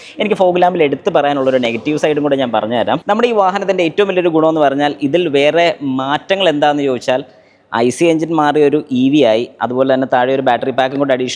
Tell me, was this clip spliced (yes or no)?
yes